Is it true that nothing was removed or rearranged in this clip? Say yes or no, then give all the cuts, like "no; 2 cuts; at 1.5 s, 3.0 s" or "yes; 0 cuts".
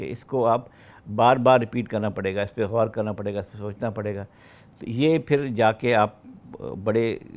yes; 0 cuts